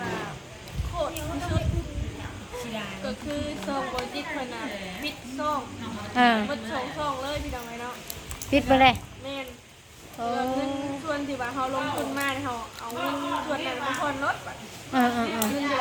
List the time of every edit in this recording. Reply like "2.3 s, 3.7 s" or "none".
none